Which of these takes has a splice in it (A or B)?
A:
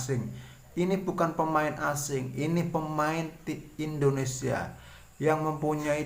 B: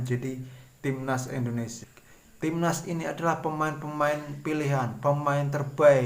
B